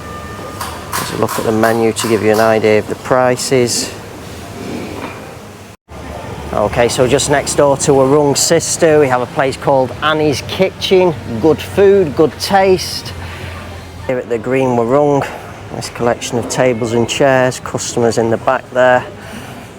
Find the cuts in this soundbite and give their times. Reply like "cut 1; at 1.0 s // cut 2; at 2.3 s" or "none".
cut 1; at 5.7 s // cut 2; at 14.1 s